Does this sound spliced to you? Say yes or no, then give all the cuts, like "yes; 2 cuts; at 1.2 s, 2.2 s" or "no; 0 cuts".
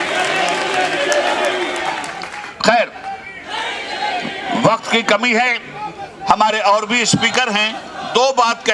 no; 0 cuts